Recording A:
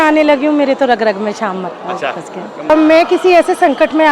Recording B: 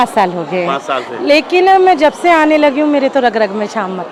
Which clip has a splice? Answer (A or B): A